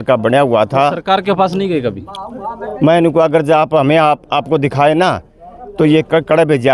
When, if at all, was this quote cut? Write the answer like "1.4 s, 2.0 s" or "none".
none